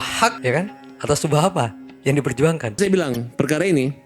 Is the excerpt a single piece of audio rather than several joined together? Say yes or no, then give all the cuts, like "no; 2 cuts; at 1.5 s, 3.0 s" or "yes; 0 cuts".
no; 1 cut; at 2.8 s